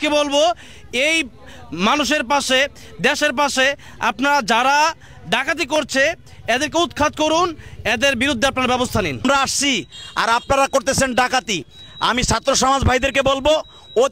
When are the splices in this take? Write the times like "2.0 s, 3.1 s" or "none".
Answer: 9.2 s